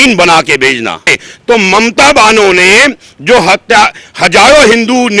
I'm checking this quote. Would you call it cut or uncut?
cut